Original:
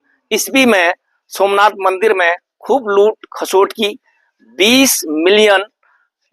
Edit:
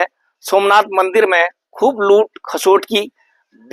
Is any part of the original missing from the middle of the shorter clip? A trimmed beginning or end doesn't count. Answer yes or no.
no